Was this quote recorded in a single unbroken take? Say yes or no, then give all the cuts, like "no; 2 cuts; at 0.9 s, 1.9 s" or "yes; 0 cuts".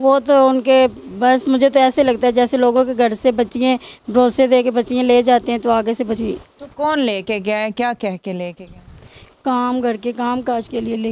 no; 1 cut; at 6.2 s